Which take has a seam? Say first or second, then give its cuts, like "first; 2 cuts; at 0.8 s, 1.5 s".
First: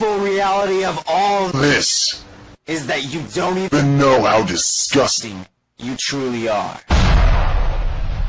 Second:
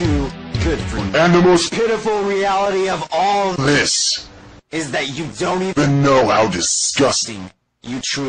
second; 1 cut; at 1.0 s